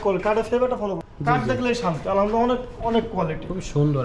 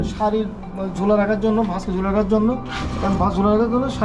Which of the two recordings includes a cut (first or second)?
first